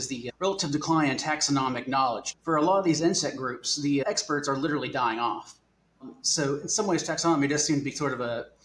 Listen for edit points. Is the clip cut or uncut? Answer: cut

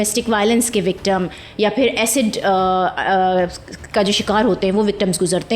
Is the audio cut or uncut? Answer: uncut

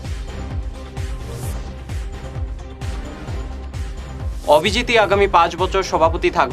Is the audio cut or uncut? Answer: cut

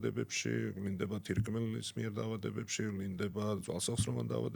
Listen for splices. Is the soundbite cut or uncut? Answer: uncut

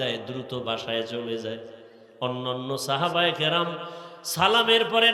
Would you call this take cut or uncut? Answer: uncut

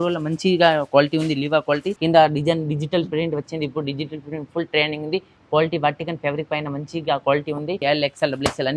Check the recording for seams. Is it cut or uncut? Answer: cut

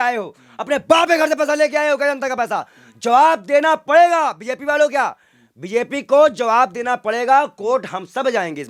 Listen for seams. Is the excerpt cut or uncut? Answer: uncut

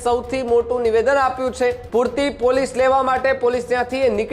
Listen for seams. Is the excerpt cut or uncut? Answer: cut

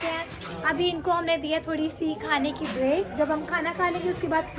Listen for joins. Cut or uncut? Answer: uncut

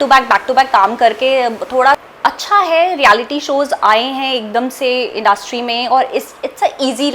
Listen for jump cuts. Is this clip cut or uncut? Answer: cut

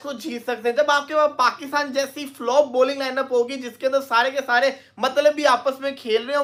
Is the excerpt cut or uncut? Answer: uncut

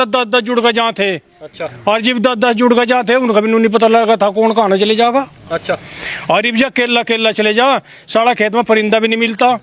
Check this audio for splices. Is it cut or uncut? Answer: uncut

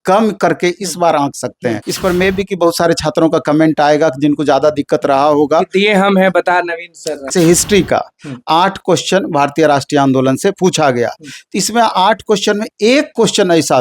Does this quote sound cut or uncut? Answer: cut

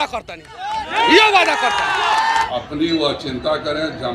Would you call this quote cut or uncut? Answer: cut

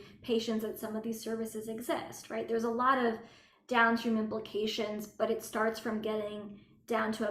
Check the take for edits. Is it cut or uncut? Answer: uncut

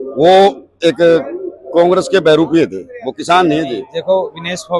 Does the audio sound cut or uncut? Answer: cut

